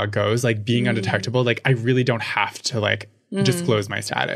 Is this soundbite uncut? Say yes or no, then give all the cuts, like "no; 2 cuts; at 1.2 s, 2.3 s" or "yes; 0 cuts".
yes; 0 cuts